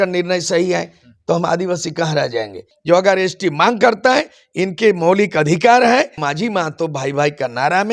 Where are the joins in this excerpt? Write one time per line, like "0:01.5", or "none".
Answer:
0:02.7
0:06.2